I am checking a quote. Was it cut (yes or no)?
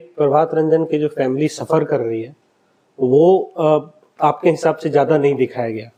no